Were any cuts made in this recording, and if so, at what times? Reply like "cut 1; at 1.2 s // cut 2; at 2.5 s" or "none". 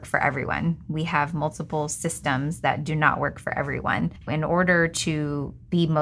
cut 1; at 4.2 s

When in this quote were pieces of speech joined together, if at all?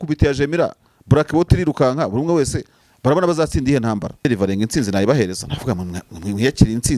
cut 1; at 4.2 s

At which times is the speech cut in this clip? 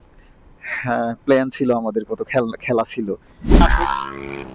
cut 1; at 3.6 s

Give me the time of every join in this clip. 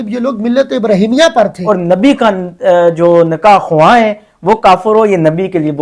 cut 1; at 1.6 s

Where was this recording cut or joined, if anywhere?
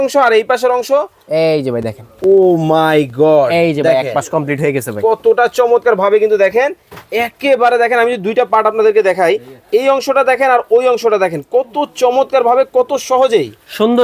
none

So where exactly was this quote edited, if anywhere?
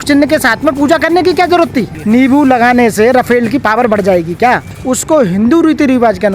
cut 1; at 1.9 s // cut 2; at 4.7 s

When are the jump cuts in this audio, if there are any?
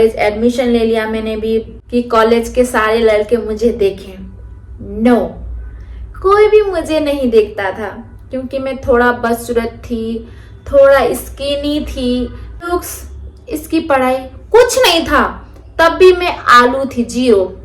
cut 1; at 1.8 s // cut 2; at 12.7 s

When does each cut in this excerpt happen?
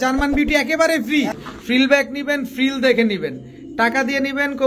cut 1; at 1.4 s

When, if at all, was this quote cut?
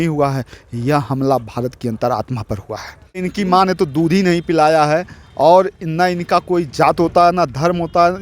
cut 1; at 3.2 s

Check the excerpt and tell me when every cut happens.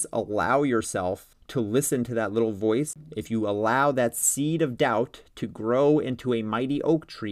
cut 1; at 1.3 s // cut 2; at 3.0 s

